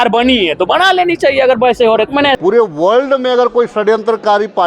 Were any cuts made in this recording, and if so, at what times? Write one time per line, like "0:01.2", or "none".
0:02.4